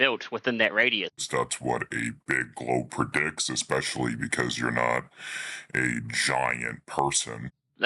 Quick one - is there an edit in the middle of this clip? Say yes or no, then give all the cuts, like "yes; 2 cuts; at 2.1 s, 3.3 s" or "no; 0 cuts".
no; 0 cuts